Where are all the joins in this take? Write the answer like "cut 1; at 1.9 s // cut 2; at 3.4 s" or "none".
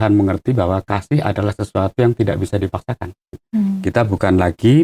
cut 1; at 3.4 s